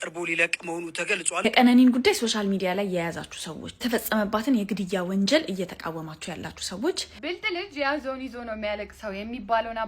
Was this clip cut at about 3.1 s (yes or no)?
no